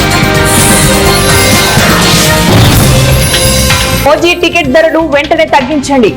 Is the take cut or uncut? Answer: cut